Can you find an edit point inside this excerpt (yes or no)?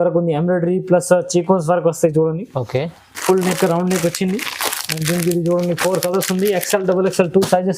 no